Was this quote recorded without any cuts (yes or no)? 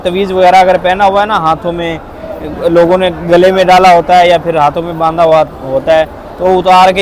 yes